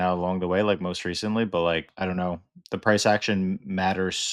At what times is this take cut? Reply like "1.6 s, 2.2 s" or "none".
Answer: 1.9 s